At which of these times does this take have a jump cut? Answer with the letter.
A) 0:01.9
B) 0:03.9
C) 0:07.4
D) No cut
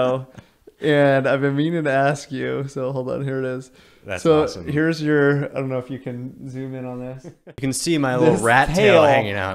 C